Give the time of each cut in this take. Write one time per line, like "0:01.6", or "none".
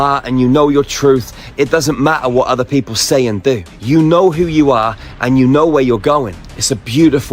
0:06.4